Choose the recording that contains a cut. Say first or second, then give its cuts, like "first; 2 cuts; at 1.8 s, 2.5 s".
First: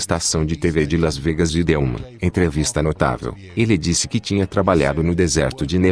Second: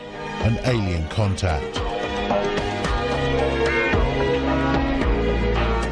first; 1 cut; at 2.1 s